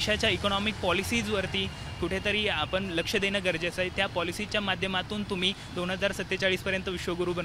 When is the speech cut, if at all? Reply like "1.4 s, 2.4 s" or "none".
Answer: none